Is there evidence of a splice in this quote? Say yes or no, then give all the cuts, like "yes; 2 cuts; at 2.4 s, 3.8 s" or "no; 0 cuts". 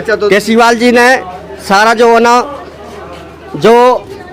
no; 0 cuts